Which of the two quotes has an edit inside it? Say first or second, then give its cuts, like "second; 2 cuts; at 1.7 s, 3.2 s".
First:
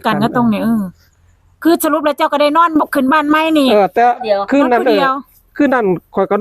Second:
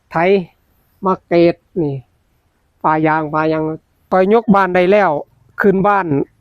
second; 1 cut; at 4.0 s